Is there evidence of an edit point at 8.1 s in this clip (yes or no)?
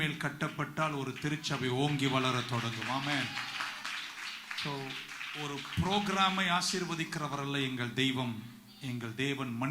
no